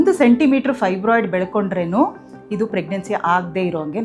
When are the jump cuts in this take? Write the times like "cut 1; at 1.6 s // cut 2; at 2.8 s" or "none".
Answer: none